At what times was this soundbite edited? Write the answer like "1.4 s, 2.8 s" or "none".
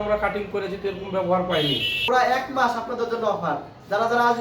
2.0 s